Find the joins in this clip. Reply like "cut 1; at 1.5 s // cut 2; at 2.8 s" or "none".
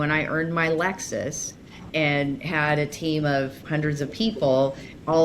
cut 1; at 1.9 s // cut 2; at 3.6 s